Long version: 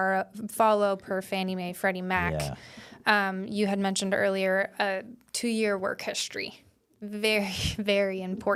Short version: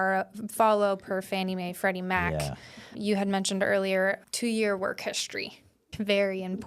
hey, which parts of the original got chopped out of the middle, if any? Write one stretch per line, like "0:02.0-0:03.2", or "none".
0:02.9-0:03.4
0:04.7-0:05.2
0:06.8-0:07.6